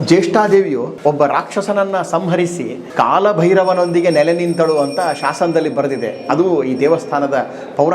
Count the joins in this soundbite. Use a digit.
2